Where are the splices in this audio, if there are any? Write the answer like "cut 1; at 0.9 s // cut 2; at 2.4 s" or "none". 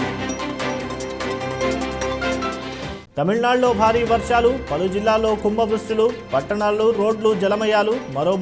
cut 1; at 2.6 s